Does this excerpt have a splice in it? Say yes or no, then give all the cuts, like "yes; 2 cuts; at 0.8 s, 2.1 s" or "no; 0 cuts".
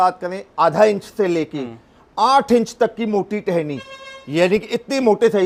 no; 0 cuts